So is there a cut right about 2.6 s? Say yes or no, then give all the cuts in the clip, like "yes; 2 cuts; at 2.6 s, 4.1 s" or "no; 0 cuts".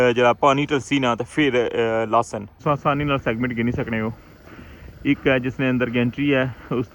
yes; 1 cut; at 2.6 s